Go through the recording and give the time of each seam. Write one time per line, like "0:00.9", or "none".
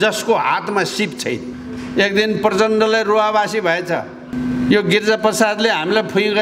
0:01.5
0:04.3

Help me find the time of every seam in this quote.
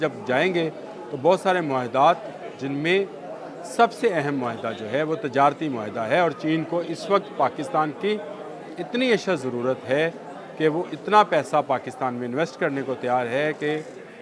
none

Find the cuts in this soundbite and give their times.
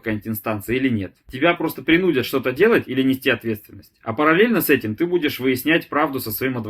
0:01.2

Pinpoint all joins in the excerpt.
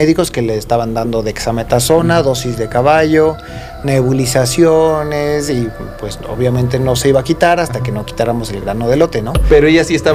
none

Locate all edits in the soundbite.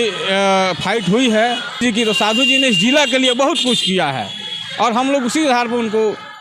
0:01.8

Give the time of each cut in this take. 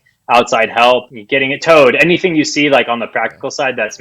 0:01.2

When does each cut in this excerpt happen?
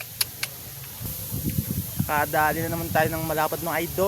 0:01.1

